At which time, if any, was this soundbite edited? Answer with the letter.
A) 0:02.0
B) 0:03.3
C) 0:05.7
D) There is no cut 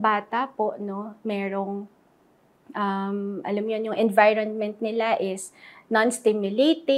D